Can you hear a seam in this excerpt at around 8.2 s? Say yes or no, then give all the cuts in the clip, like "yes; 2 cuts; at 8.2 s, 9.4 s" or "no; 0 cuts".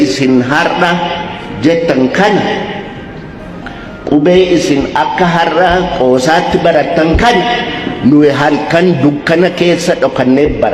no; 0 cuts